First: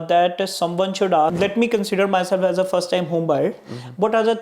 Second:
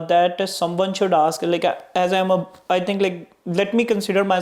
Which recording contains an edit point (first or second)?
first